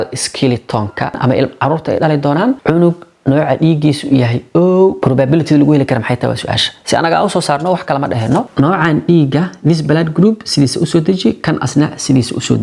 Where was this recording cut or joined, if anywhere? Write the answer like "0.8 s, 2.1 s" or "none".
1.1 s, 2.6 s, 5.0 s, 8.5 s

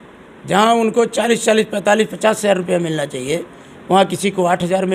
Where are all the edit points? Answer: none

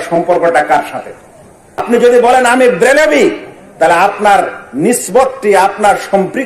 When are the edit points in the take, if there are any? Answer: 1.8 s

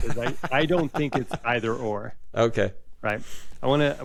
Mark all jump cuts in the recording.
none

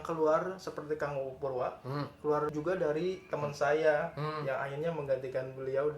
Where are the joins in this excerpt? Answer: 2.5 s

